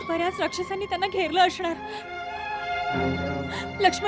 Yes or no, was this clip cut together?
no